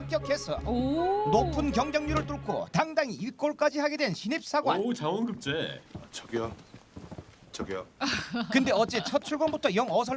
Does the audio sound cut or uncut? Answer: cut